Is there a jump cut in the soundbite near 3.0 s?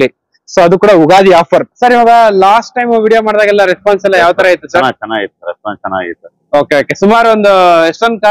no; 1 cut; at 1.7 s

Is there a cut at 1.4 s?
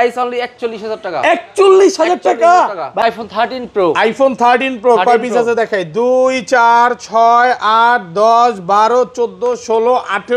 no; 1 cut; at 3.0 s

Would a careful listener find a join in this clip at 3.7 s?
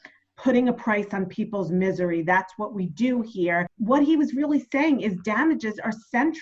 yes; 1 cut; at 3.7 s

